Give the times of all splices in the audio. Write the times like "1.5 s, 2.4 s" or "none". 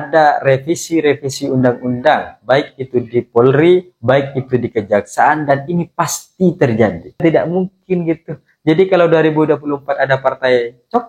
7.2 s